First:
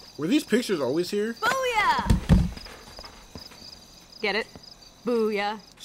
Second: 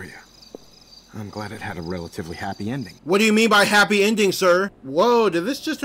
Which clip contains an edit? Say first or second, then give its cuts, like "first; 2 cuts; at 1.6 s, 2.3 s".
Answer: second; 1 cut; at 4.8 s